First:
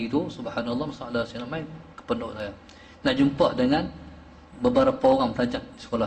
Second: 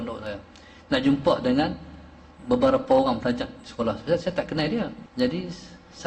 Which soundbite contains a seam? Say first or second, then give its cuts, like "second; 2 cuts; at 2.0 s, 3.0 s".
second; 1 cut; at 5.0 s